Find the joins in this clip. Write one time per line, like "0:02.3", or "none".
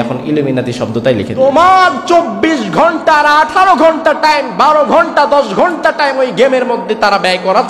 0:01.3